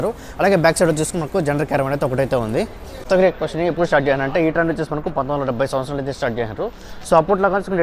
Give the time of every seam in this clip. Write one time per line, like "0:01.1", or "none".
0:02.8